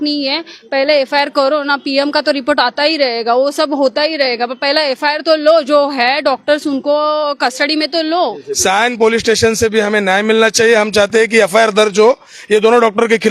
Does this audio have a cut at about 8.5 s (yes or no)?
yes